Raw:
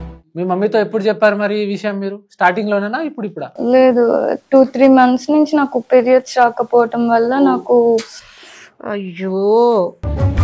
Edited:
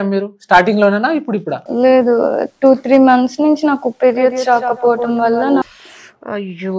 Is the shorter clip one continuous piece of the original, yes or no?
no